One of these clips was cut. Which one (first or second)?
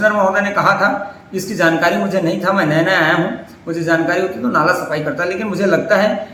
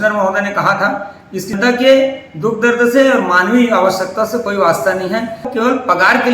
second